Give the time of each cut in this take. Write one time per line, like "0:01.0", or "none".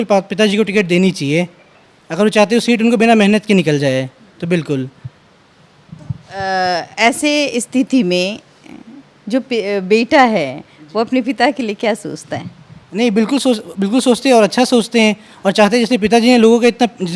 none